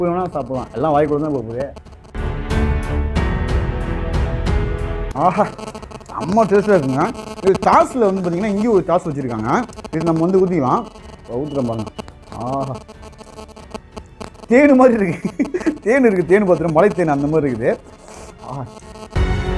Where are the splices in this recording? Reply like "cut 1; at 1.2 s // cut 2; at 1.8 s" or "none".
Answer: none